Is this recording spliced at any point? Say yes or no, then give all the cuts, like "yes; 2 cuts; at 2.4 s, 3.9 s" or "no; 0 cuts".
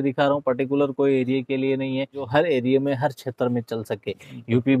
yes; 1 cut; at 2.3 s